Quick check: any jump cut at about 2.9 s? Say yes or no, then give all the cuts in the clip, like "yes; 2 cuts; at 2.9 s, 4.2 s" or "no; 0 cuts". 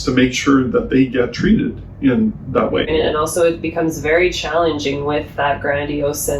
yes; 1 cut; at 2.9 s